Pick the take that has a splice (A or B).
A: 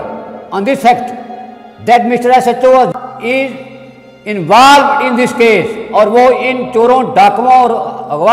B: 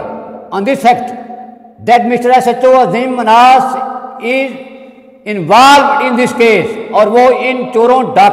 A